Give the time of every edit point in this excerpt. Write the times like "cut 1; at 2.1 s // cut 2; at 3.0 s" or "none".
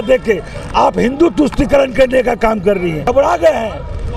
cut 1; at 3.1 s